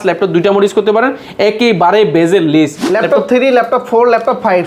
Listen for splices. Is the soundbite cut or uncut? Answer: cut